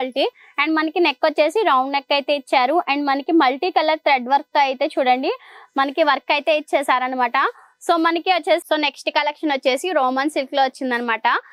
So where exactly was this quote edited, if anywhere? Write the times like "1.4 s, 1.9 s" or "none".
8.6 s